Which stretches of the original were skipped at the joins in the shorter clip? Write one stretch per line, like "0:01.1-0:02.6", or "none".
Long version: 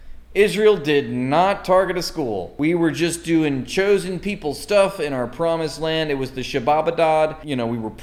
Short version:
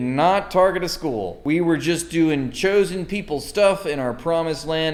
none